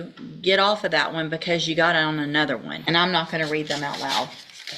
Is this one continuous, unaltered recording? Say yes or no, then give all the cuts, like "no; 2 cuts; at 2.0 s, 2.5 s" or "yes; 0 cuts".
no; 1 cut; at 2.7 s